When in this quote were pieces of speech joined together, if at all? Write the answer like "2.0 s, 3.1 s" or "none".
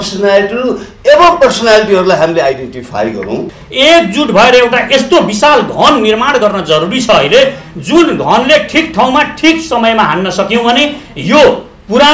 3.6 s